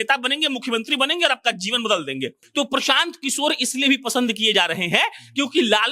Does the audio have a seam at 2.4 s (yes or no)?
yes